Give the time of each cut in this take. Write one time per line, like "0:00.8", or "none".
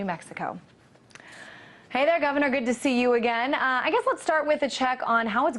0:04.3